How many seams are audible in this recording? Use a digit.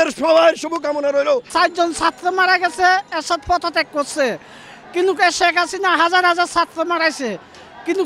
1